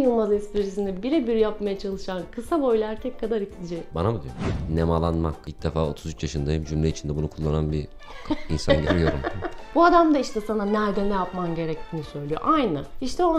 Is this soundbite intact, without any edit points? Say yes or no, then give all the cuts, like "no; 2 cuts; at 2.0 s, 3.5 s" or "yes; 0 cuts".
no; 2 cuts; at 4.3 s, 9.7 s